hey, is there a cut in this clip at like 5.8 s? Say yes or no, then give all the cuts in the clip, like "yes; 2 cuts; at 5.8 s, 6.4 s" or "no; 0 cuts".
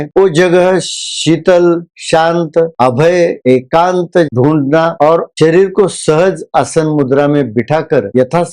no; 1 cut; at 4.3 s